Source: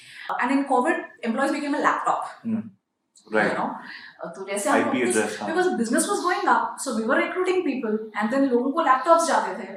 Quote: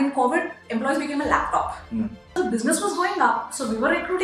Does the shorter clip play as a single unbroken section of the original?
no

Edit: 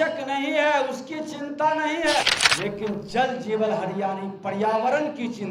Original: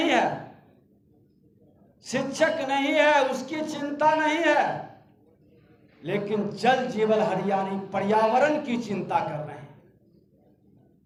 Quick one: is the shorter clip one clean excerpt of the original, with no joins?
no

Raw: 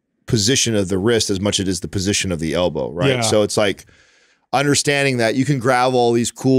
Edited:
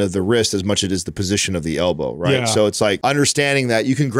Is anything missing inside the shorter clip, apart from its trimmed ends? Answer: yes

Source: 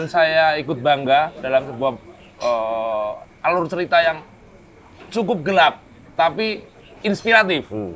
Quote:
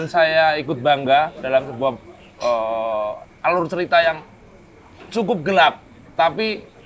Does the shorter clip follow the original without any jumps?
yes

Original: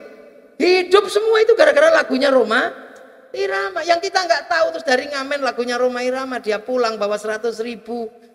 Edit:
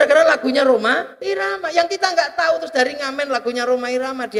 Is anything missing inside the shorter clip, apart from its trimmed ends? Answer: yes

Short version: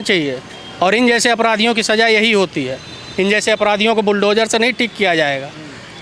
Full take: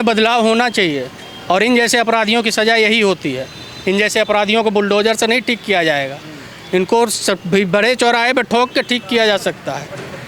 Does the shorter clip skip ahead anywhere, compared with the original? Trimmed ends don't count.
no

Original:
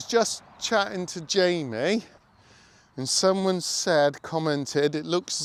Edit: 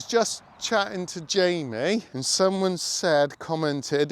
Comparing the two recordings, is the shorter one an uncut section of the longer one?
no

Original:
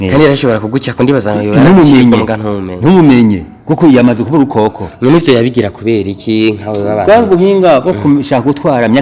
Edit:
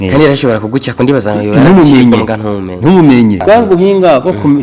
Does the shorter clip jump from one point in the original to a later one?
yes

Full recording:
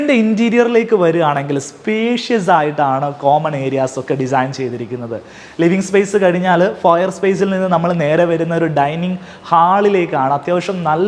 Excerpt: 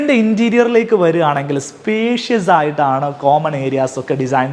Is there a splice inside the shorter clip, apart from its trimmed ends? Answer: no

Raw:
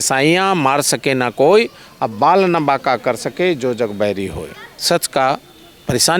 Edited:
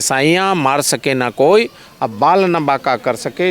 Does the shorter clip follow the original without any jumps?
yes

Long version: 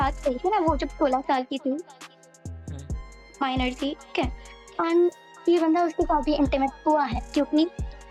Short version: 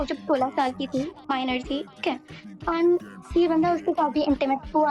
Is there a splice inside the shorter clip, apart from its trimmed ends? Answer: yes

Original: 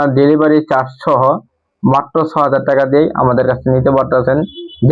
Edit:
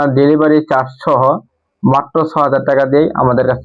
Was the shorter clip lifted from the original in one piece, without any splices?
yes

